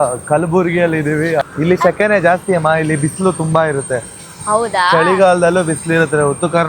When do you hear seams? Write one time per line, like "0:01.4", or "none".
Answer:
0:01.4